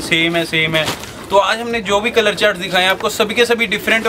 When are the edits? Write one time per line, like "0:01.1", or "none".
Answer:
none